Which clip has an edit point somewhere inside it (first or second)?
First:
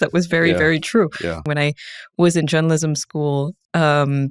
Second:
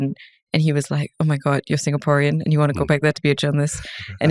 first